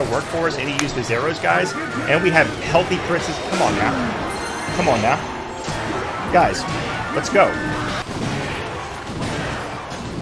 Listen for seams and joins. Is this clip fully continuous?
no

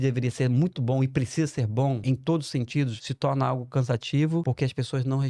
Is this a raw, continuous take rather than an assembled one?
no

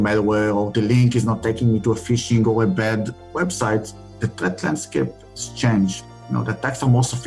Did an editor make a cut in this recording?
yes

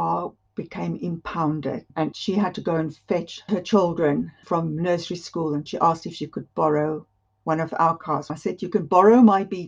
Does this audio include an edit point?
yes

